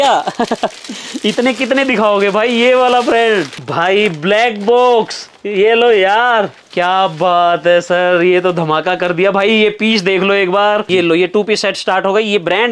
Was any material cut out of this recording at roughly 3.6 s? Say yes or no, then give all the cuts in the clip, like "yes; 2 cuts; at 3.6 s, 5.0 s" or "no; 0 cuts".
yes; 3 cuts; at 3.6 s, 6.6 s, 10.8 s